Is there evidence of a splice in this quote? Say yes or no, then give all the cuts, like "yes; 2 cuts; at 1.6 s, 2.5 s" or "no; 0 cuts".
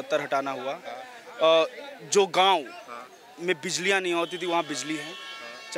no; 0 cuts